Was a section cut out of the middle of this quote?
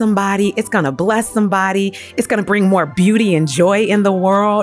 no; 0 cuts

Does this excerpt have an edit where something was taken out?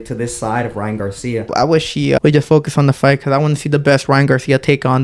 yes; 1 cut; at 1.7 s

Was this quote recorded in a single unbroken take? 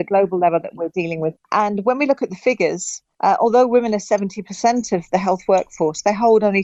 yes; 0 cuts

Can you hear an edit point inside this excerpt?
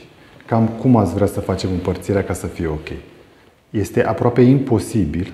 no; 0 cuts

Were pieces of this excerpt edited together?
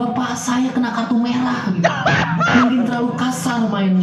no; 0 cuts

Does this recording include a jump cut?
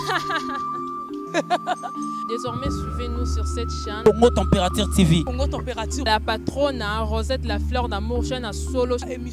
no; 0 cuts

